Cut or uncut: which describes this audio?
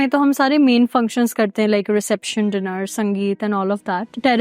uncut